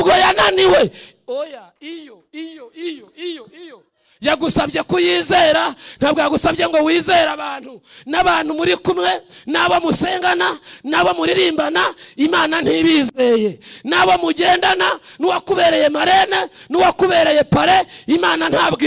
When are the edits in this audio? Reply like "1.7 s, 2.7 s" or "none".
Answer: none